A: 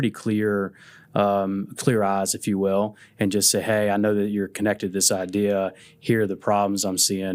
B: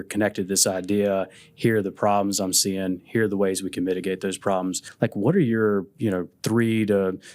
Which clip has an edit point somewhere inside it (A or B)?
B